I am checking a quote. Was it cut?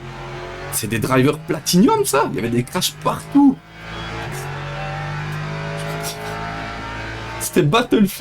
no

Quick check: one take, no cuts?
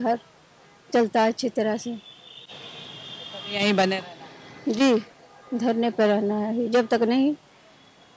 yes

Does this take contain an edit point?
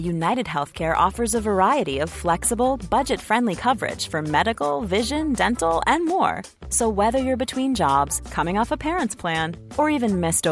no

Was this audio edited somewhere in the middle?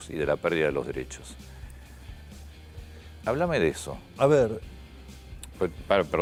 no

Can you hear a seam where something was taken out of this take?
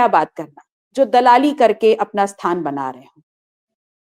no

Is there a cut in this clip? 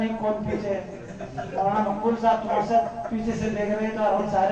no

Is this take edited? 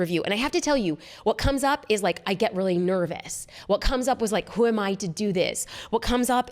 no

